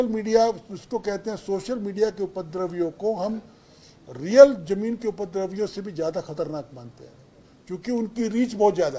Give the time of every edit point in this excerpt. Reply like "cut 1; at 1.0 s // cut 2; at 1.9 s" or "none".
none